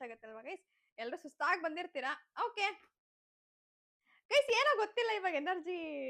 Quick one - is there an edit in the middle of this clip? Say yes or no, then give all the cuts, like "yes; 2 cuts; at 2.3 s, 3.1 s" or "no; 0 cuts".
no; 0 cuts